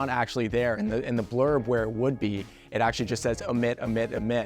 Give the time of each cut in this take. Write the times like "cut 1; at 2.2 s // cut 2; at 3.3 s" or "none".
none